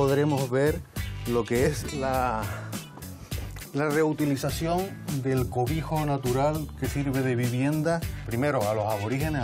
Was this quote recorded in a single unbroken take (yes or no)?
yes